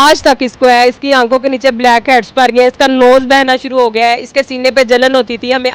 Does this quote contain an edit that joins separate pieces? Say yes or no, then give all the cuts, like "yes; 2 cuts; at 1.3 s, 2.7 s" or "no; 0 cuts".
no; 0 cuts